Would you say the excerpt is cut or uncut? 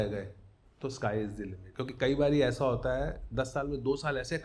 cut